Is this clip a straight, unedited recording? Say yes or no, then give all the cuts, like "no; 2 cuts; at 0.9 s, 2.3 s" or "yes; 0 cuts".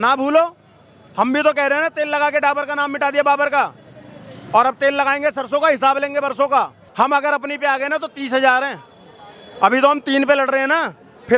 no; 1 cut; at 6.8 s